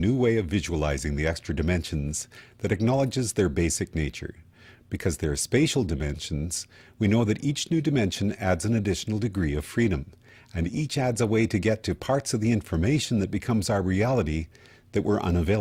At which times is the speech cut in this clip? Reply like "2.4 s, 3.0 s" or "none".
none